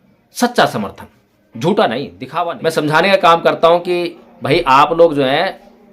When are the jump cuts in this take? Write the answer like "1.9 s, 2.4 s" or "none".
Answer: 2.2 s